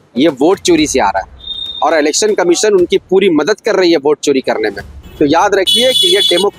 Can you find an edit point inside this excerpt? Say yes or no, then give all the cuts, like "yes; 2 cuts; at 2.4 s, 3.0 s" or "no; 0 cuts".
yes; 1 cut; at 5.0 s